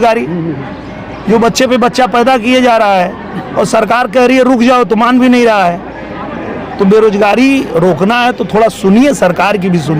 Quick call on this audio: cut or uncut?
uncut